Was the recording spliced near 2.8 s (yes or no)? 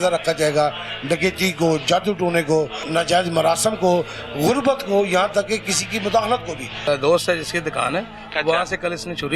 yes